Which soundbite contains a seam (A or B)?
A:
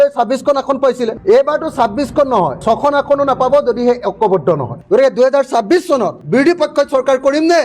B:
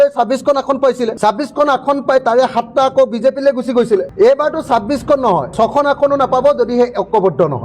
A